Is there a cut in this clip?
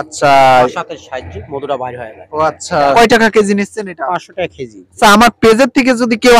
yes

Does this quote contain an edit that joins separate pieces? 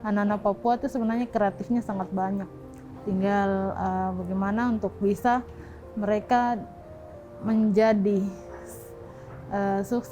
no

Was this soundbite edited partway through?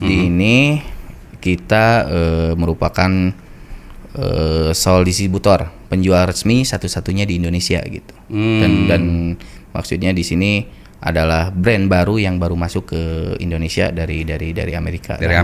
no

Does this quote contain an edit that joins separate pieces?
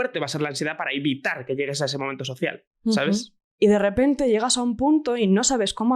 yes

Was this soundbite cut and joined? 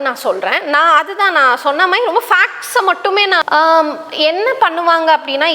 yes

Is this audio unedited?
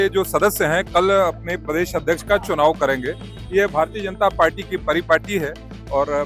yes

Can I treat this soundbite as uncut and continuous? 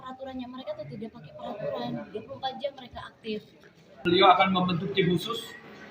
no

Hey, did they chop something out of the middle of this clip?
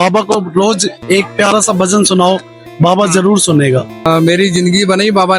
yes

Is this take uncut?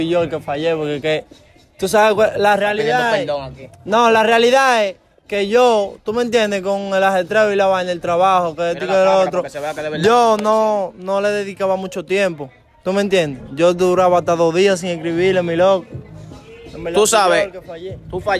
yes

